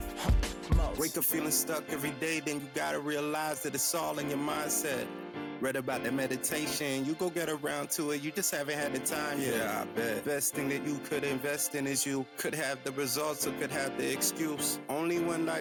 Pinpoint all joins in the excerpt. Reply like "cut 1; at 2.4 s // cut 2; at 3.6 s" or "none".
none